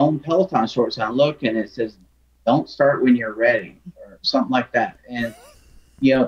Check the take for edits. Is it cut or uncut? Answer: uncut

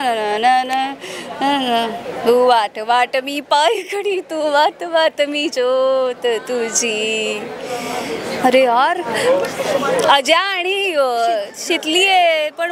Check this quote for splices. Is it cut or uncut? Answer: uncut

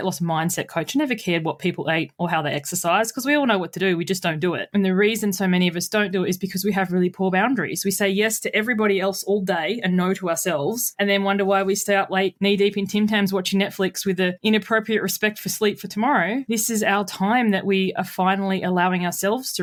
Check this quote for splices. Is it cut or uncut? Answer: uncut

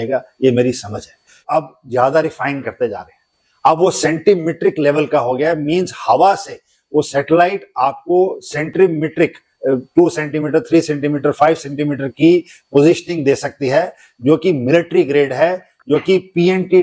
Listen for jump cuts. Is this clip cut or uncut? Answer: cut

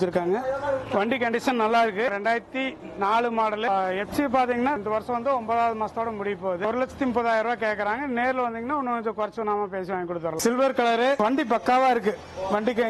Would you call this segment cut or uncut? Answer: cut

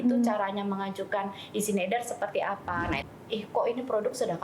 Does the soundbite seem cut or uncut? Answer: cut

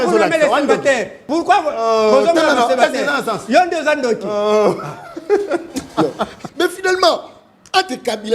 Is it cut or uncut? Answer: cut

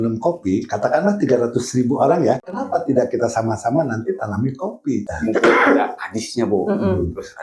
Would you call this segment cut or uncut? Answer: cut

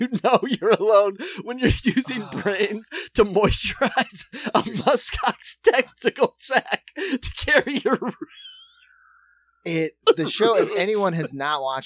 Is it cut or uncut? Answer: uncut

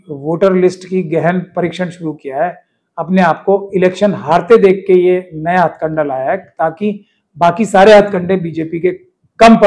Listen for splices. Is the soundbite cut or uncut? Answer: uncut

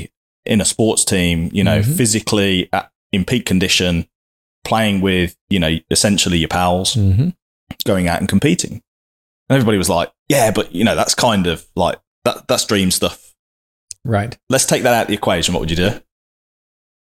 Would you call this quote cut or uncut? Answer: uncut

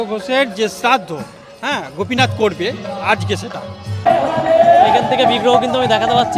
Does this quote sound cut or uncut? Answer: cut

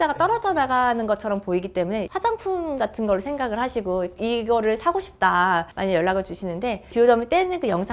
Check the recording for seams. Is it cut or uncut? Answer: cut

